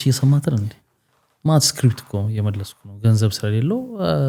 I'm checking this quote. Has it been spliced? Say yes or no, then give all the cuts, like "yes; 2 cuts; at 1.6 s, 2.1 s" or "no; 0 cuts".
no; 0 cuts